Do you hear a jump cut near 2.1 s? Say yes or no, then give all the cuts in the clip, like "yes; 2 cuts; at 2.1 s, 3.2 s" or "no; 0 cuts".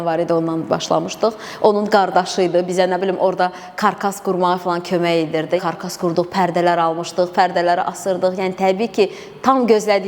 no; 1 cut; at 5.6 s